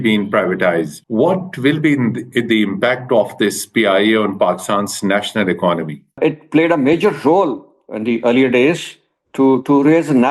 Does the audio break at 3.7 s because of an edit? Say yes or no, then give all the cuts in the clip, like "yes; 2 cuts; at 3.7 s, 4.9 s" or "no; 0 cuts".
no; 2 cuts; at 1.0 s, 6.2 s